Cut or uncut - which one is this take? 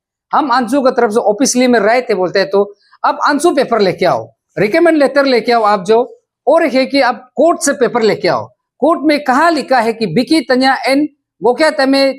uncut